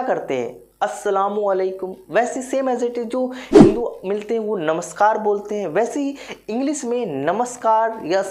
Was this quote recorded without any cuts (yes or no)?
yes